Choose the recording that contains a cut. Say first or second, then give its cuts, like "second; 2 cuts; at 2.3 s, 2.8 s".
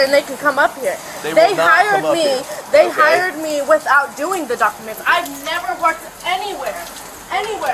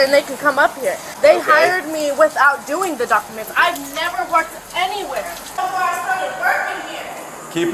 second; 2 cuts; at 1.1 s, 5.6 s